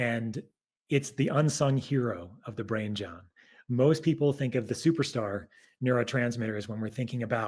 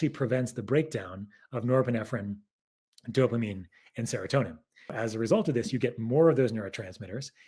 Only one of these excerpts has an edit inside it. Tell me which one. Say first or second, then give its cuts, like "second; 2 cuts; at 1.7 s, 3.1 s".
second; 1 cut; at 5.0 s